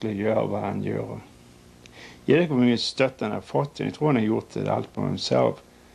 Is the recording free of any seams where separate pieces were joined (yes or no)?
yes